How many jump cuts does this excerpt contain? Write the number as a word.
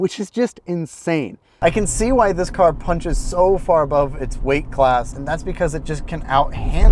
two